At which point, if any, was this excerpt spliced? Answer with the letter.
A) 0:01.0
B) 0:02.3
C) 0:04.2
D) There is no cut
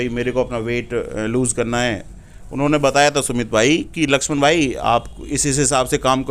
D